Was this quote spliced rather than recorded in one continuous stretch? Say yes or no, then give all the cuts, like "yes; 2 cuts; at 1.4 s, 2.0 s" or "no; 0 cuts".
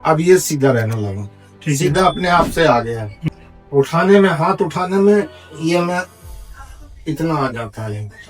yes; 1 cut; at 3.1 s